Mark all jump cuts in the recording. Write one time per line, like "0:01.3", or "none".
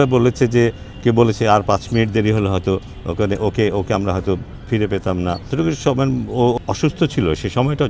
0:05.5
0:06.6